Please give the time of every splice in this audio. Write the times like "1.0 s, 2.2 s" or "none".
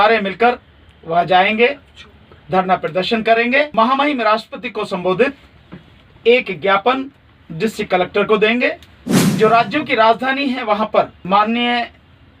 3.7 s, 11.2 s